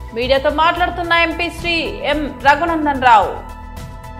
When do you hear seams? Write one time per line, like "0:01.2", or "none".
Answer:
none